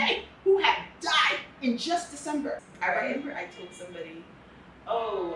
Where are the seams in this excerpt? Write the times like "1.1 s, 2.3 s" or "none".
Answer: 2.7 s